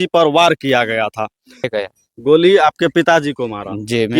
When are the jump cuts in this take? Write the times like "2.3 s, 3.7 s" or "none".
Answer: 1.7 s